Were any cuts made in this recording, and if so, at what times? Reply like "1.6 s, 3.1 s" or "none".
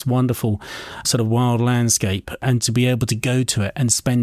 1.0 s, 2.4 s